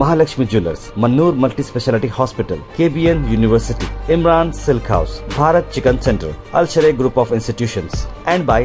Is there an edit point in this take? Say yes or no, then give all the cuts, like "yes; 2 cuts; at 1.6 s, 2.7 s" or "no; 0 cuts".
no; 0 cuts